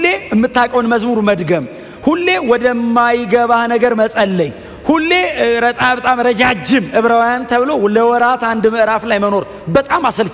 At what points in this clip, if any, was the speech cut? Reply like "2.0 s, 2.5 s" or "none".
none